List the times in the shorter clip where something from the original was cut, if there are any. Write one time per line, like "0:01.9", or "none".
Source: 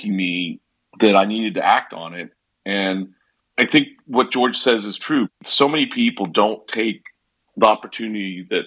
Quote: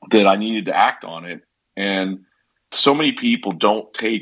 0:02.6